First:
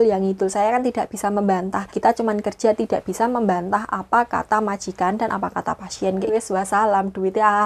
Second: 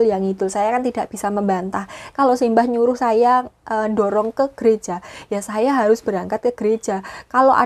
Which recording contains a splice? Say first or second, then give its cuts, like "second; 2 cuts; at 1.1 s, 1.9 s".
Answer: first; 2 cuts; at 1.8 s, 6.3 s